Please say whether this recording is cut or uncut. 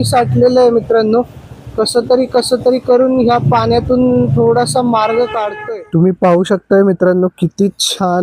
cut